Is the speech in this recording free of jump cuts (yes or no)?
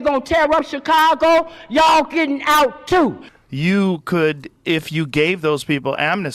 no